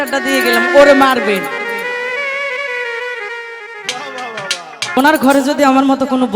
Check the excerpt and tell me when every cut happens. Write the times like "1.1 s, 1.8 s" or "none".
5.0 s